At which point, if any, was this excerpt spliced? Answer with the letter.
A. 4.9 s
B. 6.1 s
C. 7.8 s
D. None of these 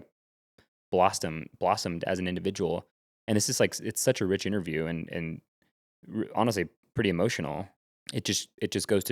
C